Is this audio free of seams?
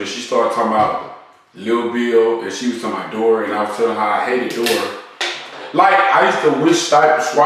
yes; 0 cuts

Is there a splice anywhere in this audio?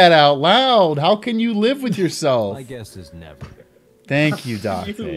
no; 0 cuts

